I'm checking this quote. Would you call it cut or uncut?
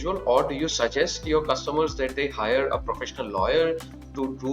uncut